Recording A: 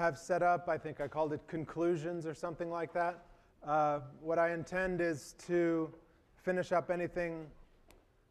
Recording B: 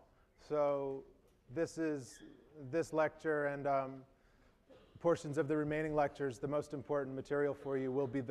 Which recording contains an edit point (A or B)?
B